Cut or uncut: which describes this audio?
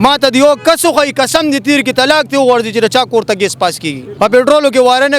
cut